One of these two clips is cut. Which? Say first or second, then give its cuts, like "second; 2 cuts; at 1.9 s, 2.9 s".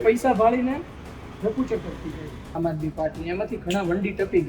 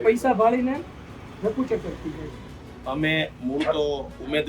first; 1 cut; at 2.6 s